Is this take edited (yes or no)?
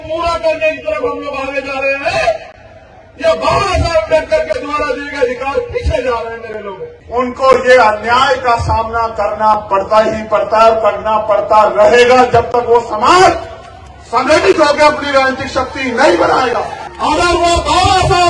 yes